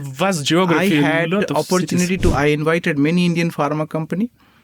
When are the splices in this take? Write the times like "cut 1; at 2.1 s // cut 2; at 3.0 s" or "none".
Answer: cut 1; at 2.3 s

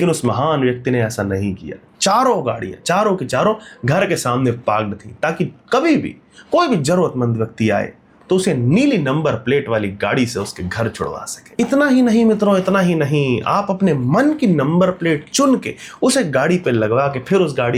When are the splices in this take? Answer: none

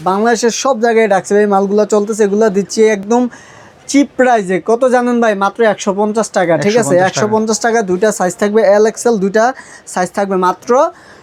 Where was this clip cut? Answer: none

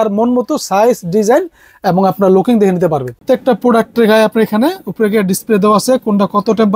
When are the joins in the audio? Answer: cut 1; at 3.2 s

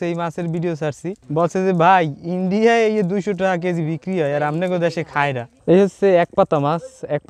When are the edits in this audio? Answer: cut 1; at 1.2 s // cut 2; at 5.5 s

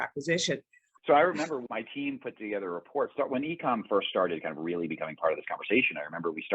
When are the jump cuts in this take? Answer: cut 1; at 1.0 s // cut 2; at 1.6 s

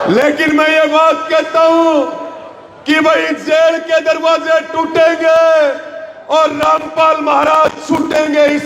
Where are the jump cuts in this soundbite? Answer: none

